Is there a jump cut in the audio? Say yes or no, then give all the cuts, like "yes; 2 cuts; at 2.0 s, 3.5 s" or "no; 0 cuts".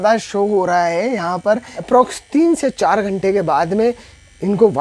yes; 1 cut; at 1.7 s